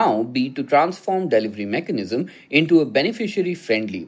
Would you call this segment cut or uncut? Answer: uncut